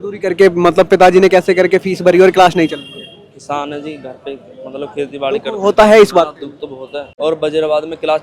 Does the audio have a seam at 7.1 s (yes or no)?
yes